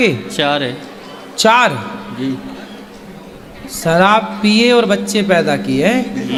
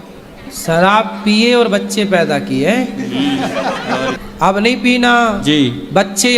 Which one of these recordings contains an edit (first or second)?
second